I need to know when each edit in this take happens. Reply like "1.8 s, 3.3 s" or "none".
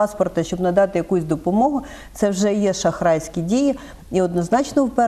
none